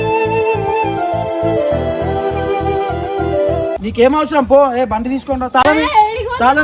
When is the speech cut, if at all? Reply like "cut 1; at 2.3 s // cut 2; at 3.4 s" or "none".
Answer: none